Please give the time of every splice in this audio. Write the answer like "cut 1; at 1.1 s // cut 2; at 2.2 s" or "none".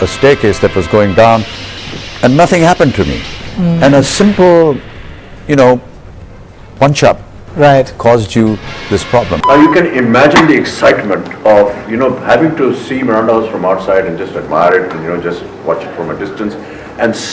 cut 1; at 9.4 s